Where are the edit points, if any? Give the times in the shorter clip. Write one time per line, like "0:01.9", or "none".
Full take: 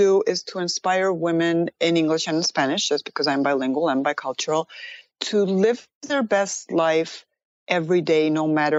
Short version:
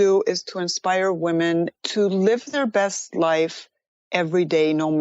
0:01.7
0:02.5